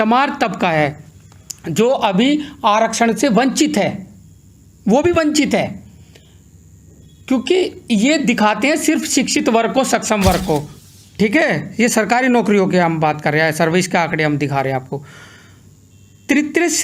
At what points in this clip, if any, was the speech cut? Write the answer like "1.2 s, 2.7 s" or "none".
10.7 s